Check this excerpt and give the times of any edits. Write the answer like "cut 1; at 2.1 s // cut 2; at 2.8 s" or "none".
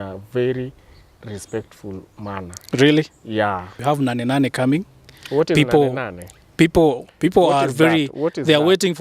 cut 1; at 3.8 s